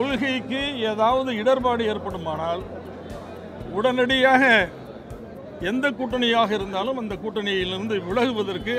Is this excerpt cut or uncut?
uncut